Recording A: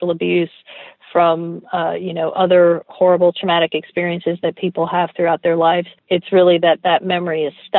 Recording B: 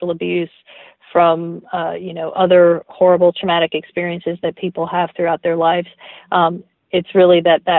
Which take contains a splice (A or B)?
A